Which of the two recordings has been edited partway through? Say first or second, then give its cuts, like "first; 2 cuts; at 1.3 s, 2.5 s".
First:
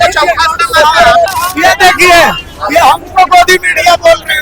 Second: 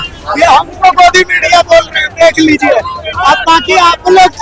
first; 1 cut; at 1.3 s